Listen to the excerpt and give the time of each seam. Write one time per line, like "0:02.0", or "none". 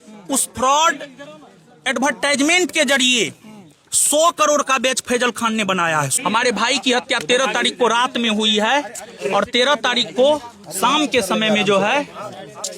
0:06.1